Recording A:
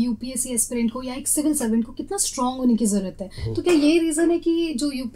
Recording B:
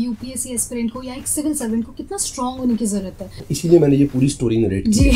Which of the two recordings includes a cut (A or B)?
B